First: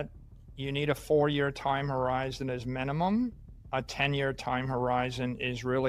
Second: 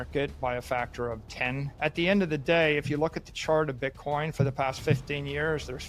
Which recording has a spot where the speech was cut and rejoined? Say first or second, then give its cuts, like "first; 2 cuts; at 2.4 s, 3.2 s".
second; 1 cut; at 1.7 s